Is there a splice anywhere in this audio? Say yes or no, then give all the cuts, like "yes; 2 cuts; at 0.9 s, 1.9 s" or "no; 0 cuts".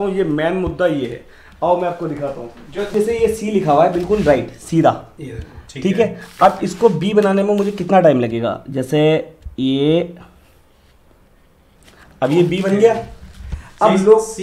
yes; 1 cut; at 2.9 s